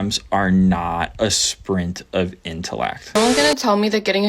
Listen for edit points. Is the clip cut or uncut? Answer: cut